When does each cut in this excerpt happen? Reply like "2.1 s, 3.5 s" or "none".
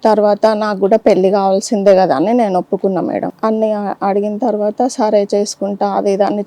3.3 s